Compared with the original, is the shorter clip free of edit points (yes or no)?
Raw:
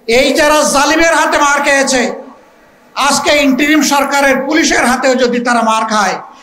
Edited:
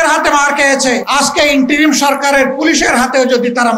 no